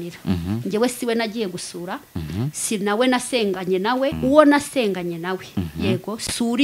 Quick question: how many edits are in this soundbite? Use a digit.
1